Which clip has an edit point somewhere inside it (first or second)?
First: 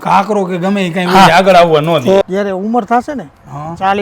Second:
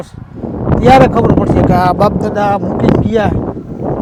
first